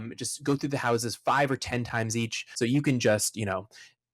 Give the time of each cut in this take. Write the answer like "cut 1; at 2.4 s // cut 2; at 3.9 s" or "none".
cut 1; at 2.4 s

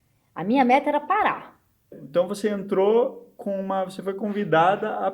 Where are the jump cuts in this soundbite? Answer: cut 1; at 1.9 s

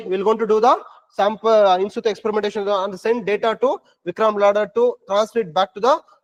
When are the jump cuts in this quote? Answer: none

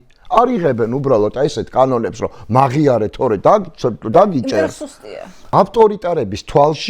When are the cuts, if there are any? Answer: cut 1; at 5.5 s

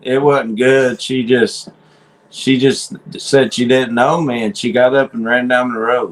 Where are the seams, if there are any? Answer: none

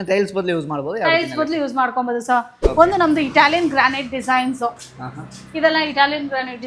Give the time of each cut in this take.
cut 1; at 2.6 s

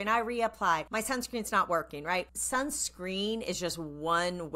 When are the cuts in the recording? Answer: cut 1; at 0.9 s // cut 2; at 2.4 s

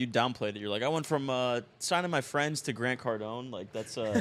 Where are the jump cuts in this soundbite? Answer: none

